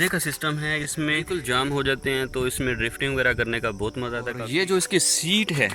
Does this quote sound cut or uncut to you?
cut